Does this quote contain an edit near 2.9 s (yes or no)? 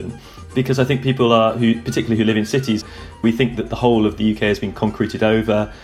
yes